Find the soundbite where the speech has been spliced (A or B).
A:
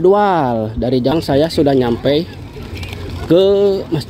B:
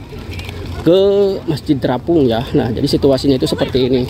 A